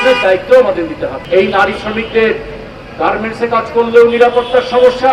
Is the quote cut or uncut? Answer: cut